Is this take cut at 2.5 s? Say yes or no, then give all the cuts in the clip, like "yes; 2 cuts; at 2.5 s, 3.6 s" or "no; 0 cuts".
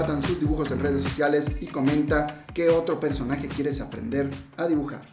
no; 0 cuts